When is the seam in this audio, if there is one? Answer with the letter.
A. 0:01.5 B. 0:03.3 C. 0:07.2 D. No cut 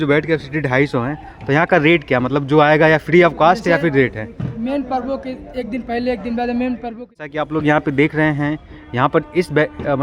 C